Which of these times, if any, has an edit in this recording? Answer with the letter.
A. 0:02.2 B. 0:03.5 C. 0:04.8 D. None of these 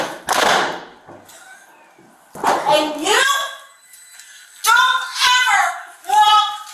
A